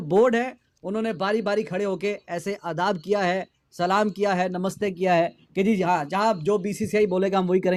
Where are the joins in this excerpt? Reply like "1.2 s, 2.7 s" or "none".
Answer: none